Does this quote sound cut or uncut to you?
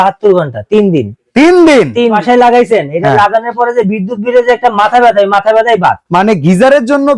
cut